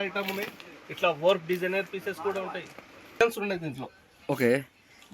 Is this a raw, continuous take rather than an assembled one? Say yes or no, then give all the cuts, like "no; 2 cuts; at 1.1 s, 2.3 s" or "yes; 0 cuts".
no; 1 cut; at 3.2 s